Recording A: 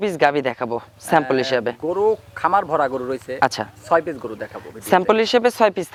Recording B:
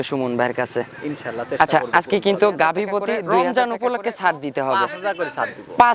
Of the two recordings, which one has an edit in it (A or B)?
B